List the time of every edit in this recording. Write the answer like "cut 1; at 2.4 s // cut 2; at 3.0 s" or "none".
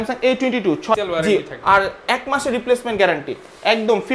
cut 1; at 1.0 s